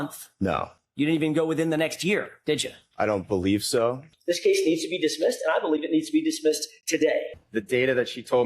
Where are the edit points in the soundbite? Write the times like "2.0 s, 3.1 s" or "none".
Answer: 4.1 s, 7.3 s